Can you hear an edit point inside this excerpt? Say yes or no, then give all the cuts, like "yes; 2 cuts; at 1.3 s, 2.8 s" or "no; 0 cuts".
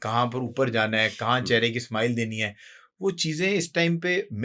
no; 0 cuts